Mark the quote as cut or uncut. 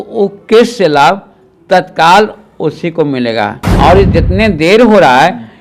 cut